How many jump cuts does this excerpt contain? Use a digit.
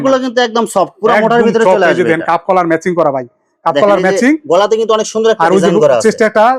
0